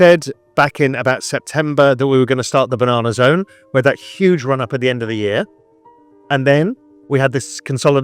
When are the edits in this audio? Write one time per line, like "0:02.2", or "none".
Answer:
none